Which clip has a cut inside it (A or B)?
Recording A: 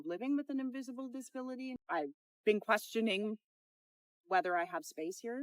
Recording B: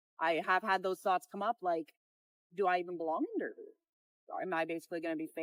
A